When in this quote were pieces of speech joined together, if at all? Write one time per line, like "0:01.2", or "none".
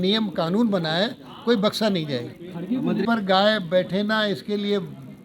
0:03.0

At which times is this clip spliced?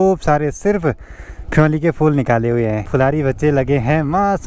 none

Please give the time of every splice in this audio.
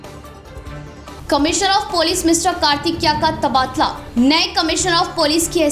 0:01.1

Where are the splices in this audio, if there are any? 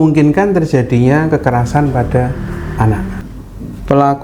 0:03.2

